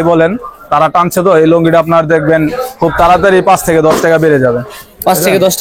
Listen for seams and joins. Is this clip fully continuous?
yes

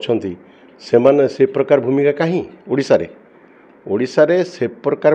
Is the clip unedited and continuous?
yes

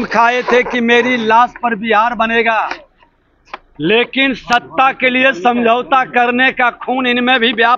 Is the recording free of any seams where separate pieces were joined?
yes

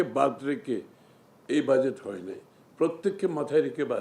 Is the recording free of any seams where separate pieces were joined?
yes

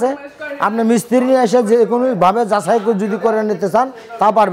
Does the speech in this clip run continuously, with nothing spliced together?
yes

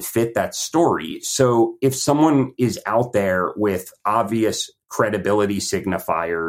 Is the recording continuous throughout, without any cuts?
yes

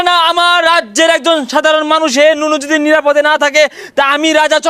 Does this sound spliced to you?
no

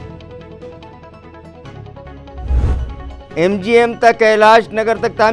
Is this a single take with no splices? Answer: no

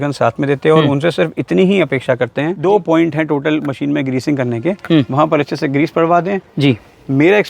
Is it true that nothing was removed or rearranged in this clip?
no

